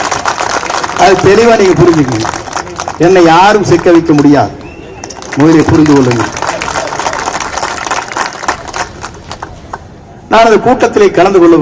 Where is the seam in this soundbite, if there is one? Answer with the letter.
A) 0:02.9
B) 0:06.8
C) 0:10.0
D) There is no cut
C